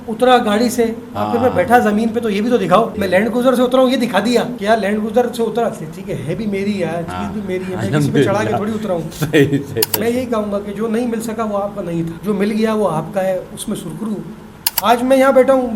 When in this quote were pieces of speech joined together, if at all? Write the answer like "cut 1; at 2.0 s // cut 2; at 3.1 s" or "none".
cut 1; at 3.0 s // cut 2; at 4.5 s // cut 3; at 9.9 s // cut 4; at 12.2 s // cut 5; at 14.7 s